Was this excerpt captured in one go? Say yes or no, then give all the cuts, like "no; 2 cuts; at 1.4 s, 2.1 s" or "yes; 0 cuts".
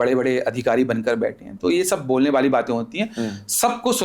yes; 0 cuts